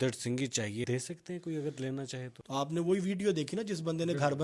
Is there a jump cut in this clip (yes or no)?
yes